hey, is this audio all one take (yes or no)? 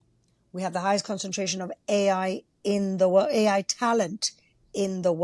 yes